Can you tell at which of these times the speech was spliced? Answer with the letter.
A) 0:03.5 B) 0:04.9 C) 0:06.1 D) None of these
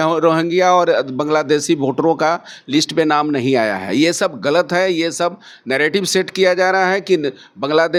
D